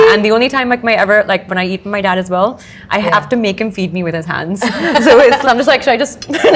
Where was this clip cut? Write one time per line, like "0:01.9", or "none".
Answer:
0:05.4